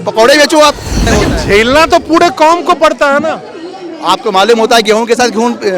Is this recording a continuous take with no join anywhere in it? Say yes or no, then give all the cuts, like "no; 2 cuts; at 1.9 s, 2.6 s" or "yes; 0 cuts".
no; 1 cut; at 1.1 s